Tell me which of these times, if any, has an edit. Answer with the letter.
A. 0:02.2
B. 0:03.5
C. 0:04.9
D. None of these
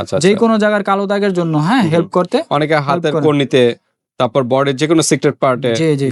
D